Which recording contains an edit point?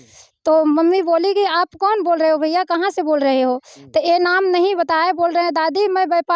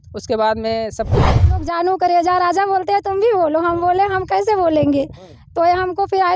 second; 1 cut; at 1.3 s

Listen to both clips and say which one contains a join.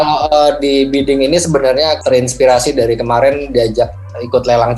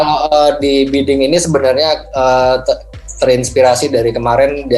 first; 1 cut; at 2.0 s

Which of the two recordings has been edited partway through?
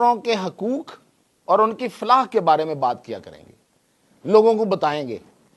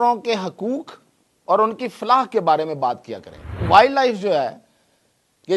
second; 1 cut; at 3.7 s

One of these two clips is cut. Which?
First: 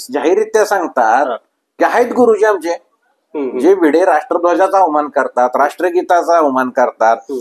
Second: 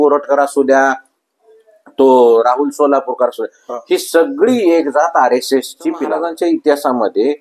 second; 1 cut; at 6.1 s

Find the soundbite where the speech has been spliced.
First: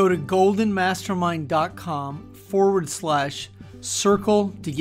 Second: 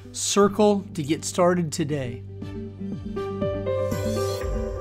second; 1 cut; at 2.2 s

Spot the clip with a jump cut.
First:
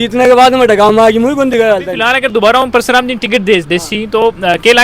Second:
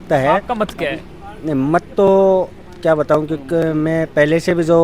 first; 1 cut; at 1.9 s

